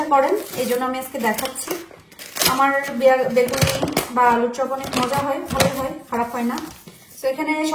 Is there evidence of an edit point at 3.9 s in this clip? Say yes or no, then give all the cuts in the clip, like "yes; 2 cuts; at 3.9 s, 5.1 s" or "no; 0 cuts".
no; 0 cuts